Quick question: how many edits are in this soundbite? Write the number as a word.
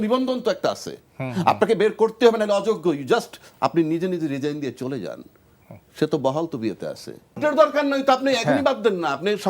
one